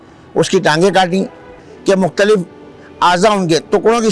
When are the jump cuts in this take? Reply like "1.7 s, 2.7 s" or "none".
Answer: 1.6 s